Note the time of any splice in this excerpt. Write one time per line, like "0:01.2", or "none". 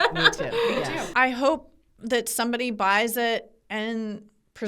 0:01.1